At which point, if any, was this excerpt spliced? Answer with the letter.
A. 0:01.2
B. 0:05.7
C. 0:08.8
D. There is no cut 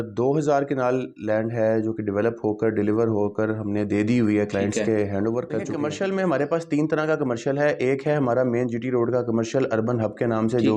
B